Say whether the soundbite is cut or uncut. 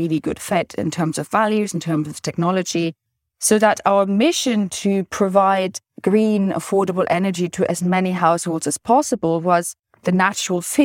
uncut